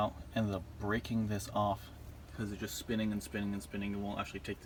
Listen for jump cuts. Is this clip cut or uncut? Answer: uncut